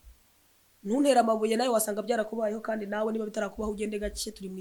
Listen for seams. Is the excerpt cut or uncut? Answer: uncut